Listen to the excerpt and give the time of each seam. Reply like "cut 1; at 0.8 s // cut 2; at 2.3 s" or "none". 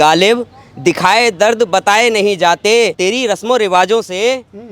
cut 1; at 2.9 s